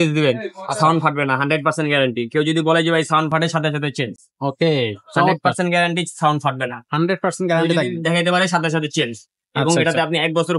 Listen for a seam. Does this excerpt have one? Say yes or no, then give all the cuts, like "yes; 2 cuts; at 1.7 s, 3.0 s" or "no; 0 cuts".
no; 0 cuts